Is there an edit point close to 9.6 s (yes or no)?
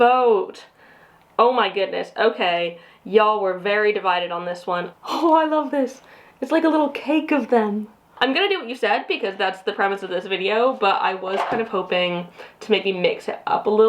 no